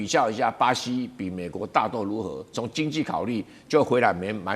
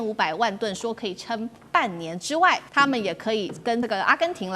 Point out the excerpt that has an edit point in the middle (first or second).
second